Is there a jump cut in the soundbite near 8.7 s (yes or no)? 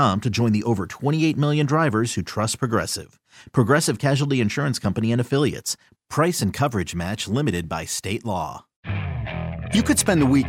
yes